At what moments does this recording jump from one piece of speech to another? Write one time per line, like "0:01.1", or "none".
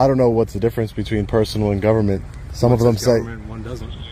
none